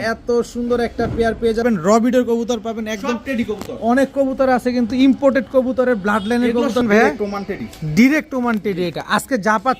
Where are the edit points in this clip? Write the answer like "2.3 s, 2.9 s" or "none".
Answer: 1.6 s, 6.8 s

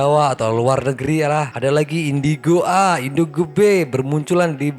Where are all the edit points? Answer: none

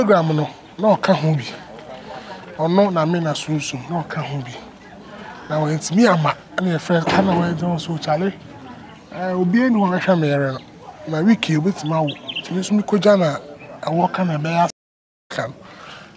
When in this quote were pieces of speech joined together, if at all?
15.2 s

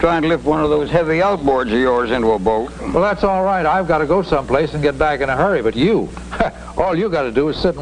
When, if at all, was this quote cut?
4.7 s

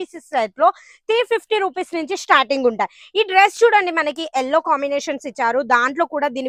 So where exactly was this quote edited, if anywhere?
none

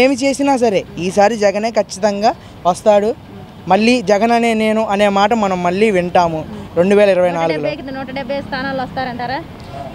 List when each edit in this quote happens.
none

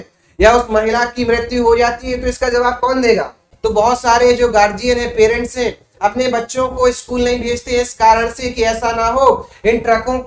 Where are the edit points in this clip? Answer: 3.4 s

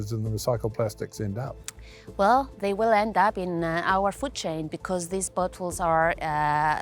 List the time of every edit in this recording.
none

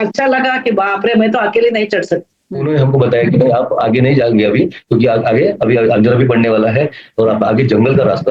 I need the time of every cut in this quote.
2.6 s

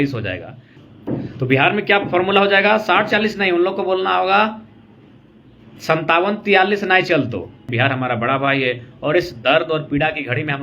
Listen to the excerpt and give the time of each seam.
7.7 s

